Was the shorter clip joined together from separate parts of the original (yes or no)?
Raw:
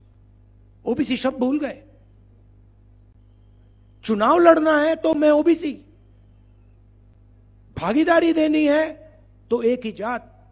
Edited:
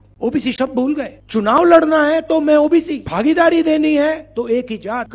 yes